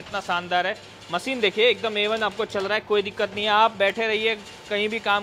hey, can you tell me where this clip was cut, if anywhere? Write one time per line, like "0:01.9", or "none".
none